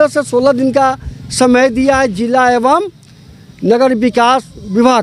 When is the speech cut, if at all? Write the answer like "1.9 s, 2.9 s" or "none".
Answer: none